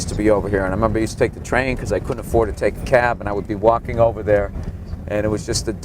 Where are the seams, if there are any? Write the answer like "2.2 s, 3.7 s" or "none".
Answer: 3.2 s